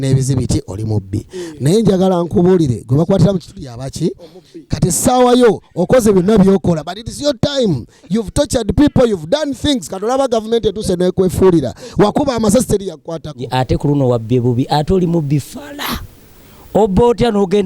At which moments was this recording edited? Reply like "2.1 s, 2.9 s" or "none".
13.5 s